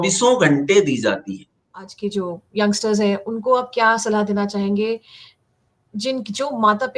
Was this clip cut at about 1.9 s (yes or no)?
yes